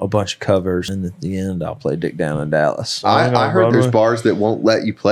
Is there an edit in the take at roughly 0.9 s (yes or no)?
yes